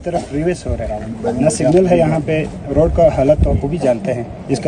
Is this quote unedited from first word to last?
no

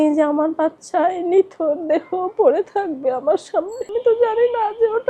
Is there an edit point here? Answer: yes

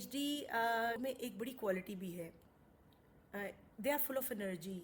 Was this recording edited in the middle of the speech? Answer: yes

